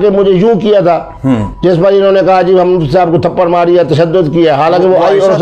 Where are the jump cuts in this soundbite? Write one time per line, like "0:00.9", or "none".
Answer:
none